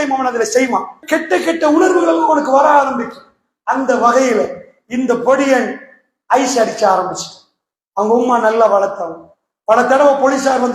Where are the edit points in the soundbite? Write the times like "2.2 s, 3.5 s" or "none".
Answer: 1.0 s